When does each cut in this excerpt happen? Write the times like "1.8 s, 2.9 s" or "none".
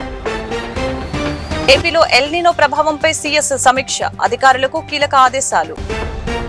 1.6 s